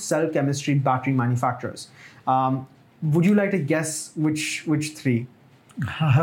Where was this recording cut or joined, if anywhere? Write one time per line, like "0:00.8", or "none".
none